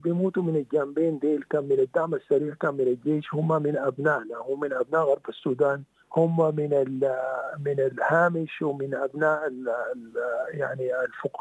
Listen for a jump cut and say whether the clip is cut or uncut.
cut